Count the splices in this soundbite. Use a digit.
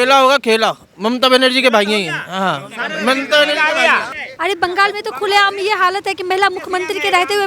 1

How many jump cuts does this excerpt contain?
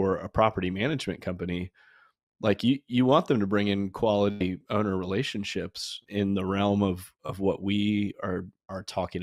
1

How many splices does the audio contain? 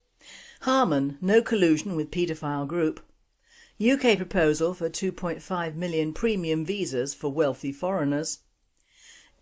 1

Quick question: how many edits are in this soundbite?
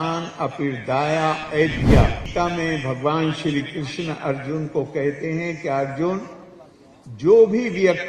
1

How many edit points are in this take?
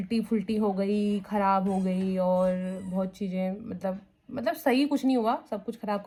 0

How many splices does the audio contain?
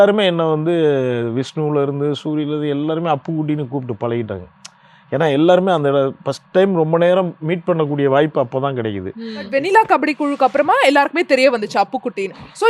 1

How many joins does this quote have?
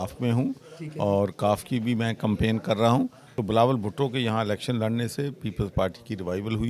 1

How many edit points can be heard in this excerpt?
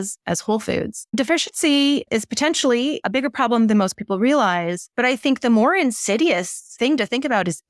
5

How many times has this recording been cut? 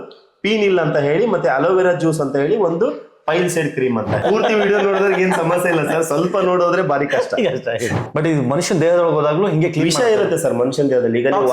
2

